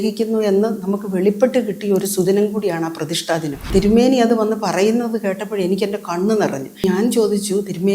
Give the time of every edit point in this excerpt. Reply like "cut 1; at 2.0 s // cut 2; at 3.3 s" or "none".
cut 1; at 3.7 s // cut 2; at 6.8 s